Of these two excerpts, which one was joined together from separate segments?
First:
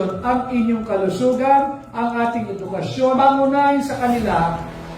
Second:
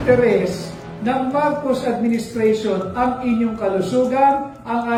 first; 1 cut; at 3.2 s

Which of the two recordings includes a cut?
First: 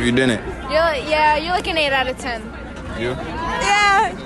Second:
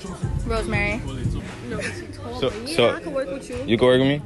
second; 1 cut; at 1.4 s

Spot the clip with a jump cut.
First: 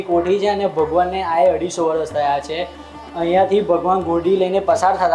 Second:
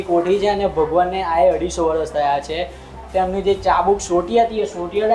second; 1 cut; at 3.0 s

